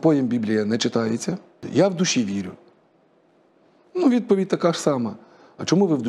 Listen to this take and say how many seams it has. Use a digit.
1